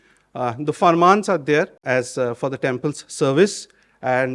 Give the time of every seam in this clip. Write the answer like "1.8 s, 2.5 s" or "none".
1.8 s